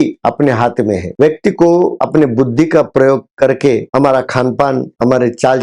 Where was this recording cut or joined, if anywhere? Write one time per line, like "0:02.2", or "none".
0:01.1